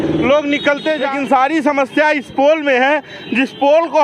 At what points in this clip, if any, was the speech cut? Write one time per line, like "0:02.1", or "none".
0:01.1